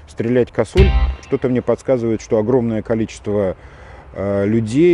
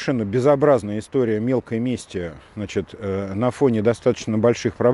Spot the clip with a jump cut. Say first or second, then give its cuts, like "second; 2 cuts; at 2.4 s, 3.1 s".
first; 1 cut; at 1.2 s